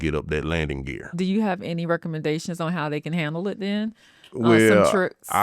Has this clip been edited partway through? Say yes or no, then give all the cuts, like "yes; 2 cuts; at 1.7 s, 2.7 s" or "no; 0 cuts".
yes; 1 cut; at 1.1 s